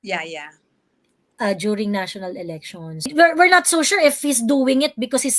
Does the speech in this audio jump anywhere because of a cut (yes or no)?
yes